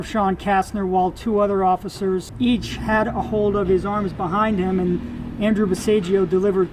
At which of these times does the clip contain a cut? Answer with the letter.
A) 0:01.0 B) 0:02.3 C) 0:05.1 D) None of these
B